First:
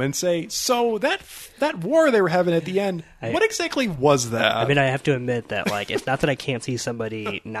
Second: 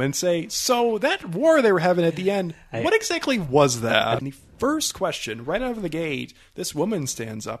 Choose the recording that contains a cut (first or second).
second